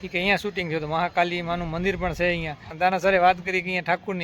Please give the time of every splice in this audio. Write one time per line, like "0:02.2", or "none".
0:02.6